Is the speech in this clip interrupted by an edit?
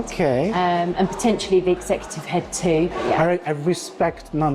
yes; 1 cut; at 2.9 s

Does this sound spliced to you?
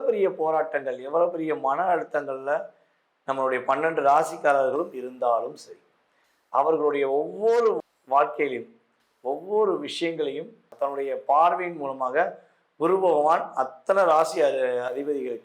yes; 1 cut; at 10.7 s

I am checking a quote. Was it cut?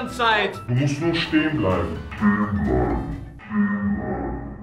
no; 0 cuts

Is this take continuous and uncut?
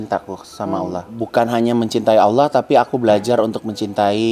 no; 1 cut; at 1.2 s

